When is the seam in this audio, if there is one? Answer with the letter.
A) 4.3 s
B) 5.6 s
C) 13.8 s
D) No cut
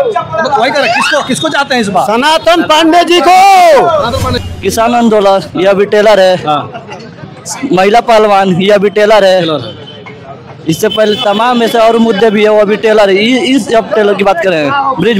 A